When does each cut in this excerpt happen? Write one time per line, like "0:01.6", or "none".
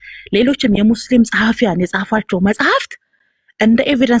none